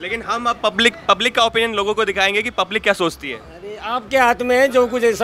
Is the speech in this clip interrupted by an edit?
no; 0 cuts

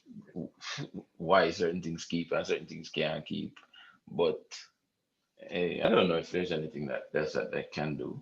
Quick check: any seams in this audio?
yes; 1 cut; at 5.8 s

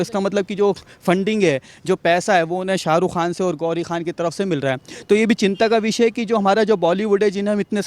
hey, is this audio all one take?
yes; 0 cuts

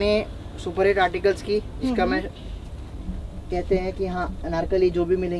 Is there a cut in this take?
no; 0 cuts

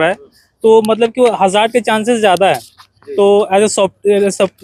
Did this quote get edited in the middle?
no; 0 cuts

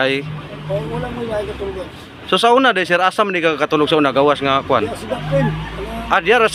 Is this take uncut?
yes; 0 cuts

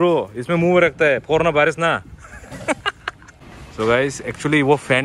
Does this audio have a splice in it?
yes; 1 cut; at 3.6 s

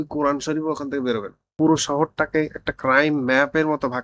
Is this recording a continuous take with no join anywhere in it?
no; 1 cut; at 1.5 s

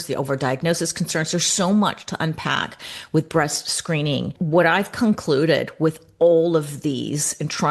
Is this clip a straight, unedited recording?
no; 1 cut; at 4.3 s

